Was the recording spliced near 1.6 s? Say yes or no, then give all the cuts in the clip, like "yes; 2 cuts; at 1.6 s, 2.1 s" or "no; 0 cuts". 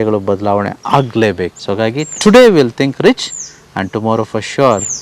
yes; 1 cut; at 1.6 s